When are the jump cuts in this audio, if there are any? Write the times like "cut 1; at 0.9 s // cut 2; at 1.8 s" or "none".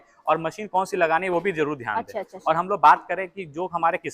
none